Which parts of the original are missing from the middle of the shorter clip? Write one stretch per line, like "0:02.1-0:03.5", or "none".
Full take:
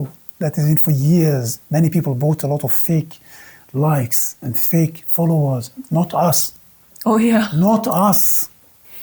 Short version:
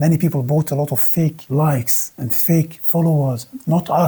0:03.1-0:03.7